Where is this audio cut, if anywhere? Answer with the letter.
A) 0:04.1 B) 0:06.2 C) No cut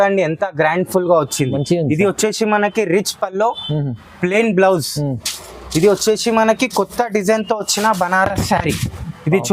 C